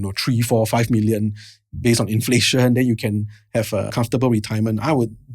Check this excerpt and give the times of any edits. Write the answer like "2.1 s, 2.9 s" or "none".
3.9 s